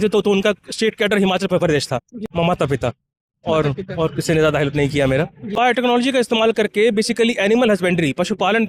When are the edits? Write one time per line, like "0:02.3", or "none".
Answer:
0:02.1
0:05.5